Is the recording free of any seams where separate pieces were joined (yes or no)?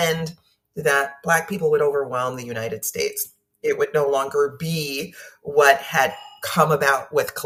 yes